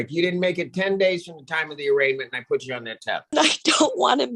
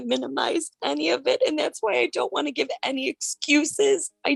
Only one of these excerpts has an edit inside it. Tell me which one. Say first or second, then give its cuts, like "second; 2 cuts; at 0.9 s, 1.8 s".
first; 1 cut; at 3.3 s